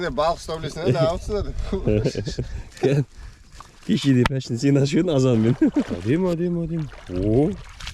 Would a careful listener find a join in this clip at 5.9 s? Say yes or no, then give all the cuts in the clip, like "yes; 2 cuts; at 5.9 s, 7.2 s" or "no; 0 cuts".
yes; 1 cut; at 5.9 s